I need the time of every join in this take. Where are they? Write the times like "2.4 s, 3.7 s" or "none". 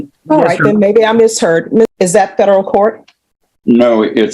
1.9 s